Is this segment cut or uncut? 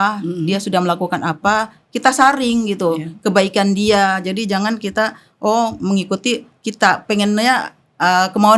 uncut